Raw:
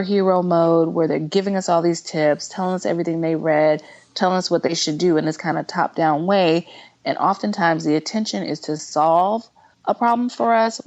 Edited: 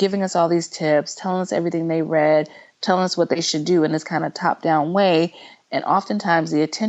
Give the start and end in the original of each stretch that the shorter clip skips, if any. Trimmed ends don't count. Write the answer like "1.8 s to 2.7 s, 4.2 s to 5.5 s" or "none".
none